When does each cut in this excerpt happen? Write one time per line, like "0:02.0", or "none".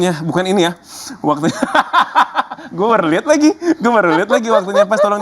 none